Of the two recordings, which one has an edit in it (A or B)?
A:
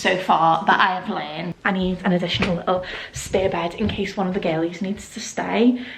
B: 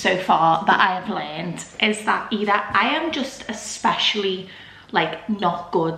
A